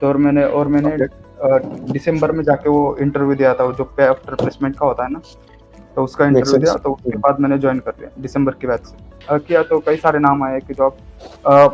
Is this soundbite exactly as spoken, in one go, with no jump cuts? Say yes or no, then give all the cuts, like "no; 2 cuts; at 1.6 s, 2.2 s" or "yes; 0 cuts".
no; 1 cut; at 9.1 s